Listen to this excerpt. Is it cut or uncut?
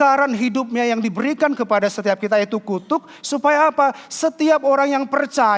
uncut